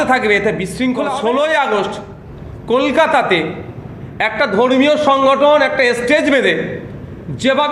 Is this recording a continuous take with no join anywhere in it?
no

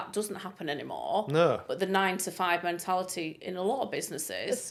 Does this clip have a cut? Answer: no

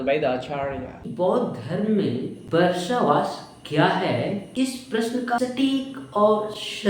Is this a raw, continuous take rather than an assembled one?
no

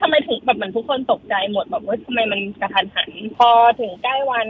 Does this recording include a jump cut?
yes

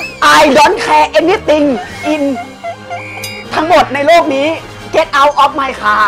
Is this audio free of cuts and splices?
yes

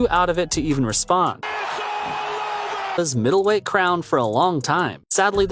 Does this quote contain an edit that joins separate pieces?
yes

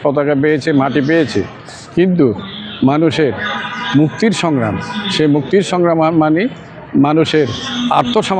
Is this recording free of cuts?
yes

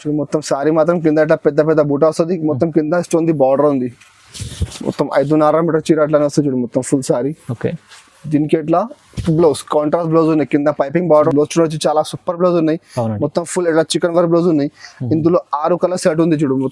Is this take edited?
yes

